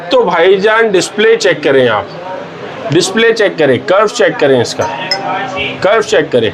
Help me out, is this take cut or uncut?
uncut